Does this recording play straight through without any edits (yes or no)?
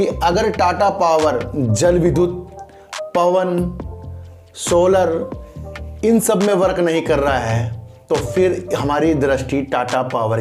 yes